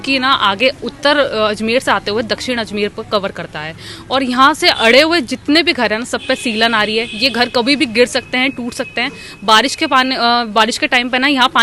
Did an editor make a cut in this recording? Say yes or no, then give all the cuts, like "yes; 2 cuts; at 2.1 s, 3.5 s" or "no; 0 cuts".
no; 0 cuts